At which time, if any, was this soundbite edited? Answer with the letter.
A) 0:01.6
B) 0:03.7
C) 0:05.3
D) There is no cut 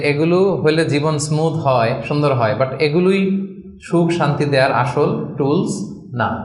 D